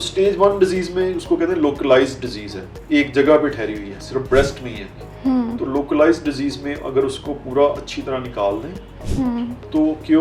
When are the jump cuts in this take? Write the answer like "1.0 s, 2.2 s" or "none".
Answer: none